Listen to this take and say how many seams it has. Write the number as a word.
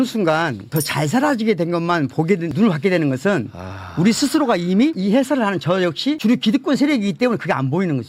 zero